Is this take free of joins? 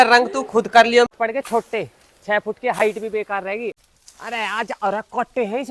no; 2 cuts; at 1.1 s, 3.9 s

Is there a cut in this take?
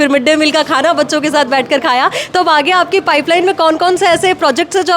no; 0 cuts

